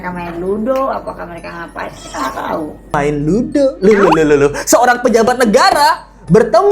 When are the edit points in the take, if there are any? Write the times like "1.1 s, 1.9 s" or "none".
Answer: 2.9 s